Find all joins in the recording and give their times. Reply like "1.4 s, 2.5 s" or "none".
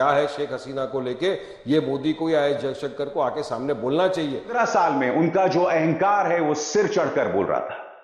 4.6 s